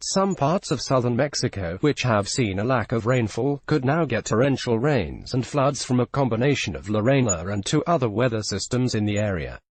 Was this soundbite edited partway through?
no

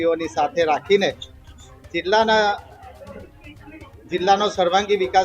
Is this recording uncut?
yes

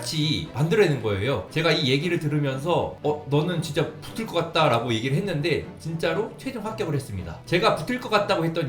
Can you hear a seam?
yes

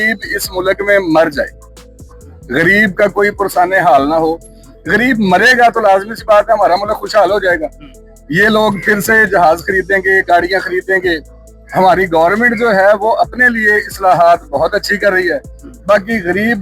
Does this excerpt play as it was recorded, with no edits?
yes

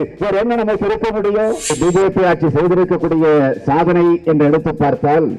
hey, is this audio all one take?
no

